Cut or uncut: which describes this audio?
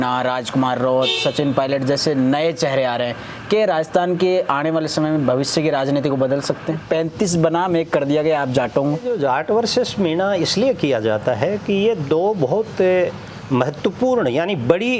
cut